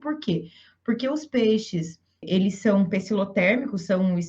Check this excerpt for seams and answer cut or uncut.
cut